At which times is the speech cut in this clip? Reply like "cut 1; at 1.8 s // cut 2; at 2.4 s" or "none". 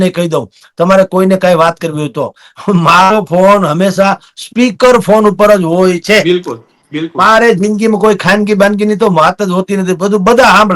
none

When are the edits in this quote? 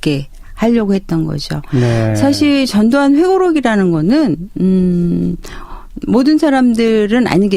none

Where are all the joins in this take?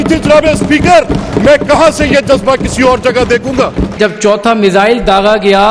cut 1; at 4.0 s

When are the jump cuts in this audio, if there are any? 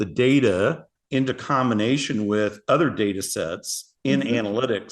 cut 1; at 0.9 s

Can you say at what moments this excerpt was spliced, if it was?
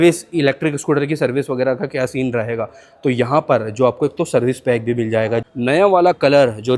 cut 1; at 5.4 s

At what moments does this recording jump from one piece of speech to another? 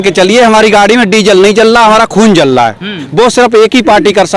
cut 1; at 3.0 s

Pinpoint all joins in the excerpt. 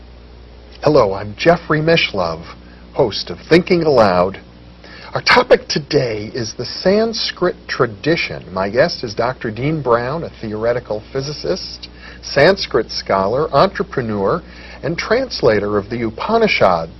cut 1; at 2.1 s

